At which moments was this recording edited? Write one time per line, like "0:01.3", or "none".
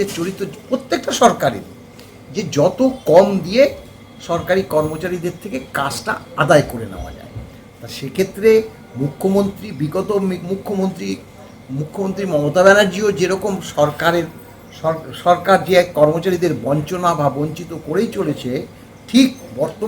none